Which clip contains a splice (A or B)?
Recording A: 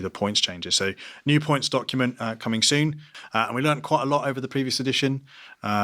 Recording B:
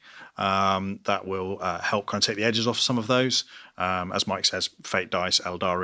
A